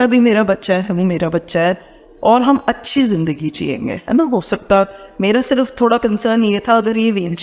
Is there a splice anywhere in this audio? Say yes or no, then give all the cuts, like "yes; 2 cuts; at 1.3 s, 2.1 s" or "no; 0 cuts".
no; 0 cuts